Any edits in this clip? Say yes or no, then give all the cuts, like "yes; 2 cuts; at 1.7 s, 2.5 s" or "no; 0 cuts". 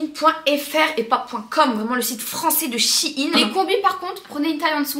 yes; 1 cut; at 3.4 s